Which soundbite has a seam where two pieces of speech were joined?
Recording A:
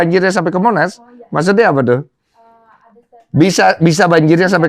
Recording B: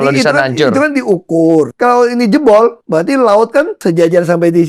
B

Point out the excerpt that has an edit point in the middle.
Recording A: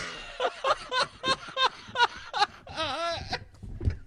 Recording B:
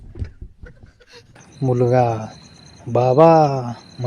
B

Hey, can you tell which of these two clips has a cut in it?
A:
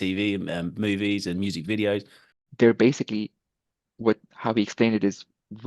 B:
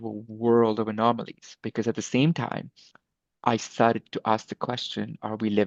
A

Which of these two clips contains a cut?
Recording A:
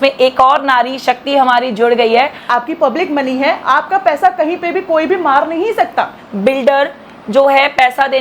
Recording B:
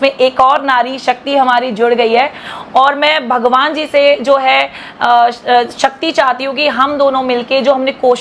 A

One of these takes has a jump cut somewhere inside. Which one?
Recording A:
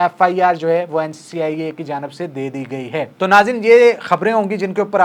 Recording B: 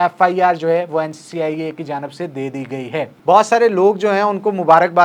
B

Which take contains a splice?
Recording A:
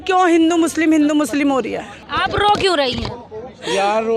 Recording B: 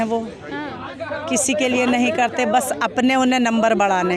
A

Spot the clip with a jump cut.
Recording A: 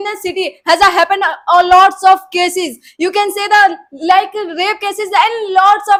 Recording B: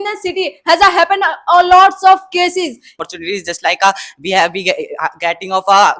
B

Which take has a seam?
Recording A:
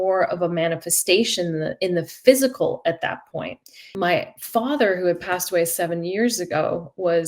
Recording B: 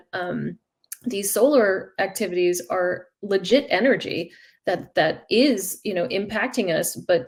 A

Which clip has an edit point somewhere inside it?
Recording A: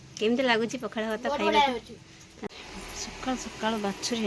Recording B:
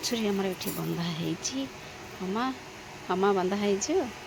A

